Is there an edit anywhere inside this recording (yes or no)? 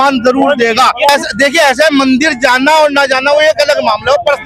no